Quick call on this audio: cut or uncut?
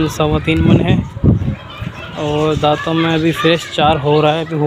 uncut